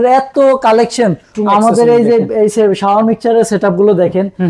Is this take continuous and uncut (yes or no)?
no